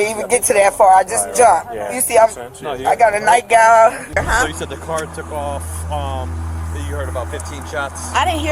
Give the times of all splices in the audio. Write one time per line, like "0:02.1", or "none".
0:04.0